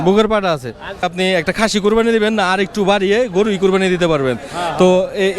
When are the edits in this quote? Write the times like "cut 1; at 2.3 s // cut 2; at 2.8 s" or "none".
cut 1; at 1.0 s